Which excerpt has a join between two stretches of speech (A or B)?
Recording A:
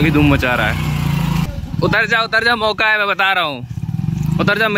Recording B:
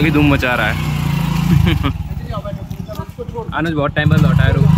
A